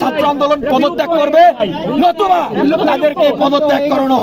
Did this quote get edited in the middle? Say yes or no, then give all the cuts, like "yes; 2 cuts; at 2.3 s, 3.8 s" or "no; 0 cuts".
no; 0 cuts